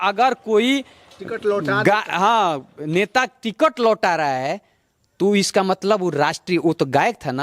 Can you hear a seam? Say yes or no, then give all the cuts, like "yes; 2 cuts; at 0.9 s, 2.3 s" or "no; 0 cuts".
no; 0 cuts